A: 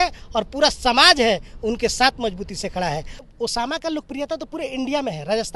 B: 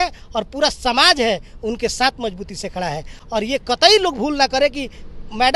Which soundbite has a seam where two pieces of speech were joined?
A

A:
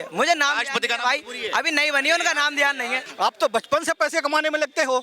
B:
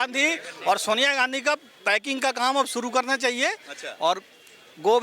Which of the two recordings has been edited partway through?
A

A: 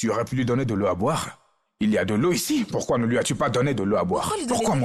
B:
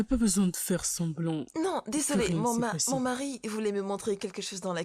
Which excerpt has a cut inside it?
B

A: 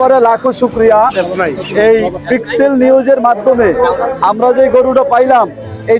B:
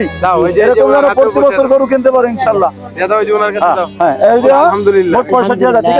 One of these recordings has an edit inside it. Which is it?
B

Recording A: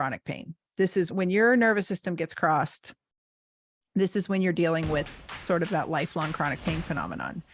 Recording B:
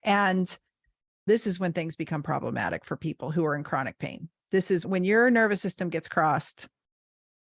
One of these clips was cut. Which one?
B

